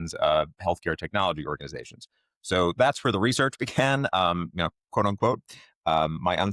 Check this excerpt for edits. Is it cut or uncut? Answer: uncut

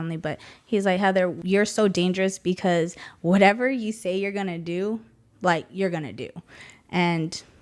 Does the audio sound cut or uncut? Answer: cut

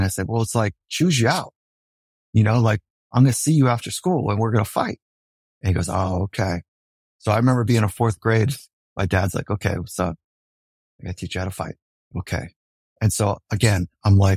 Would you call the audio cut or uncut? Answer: uncut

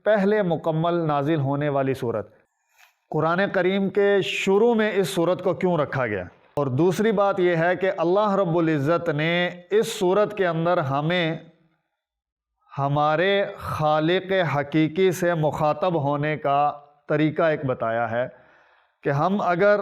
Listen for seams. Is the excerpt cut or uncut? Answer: cut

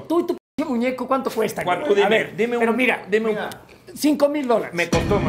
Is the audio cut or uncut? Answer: uncut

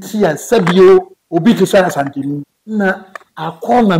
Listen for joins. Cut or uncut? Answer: cut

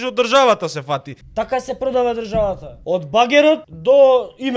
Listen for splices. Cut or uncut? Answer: cut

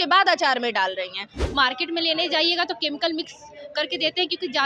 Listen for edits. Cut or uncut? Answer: cut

